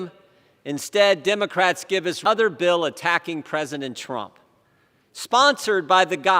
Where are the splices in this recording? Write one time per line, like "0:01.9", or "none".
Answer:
0:02.2